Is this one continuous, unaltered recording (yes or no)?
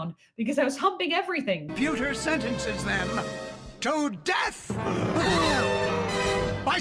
no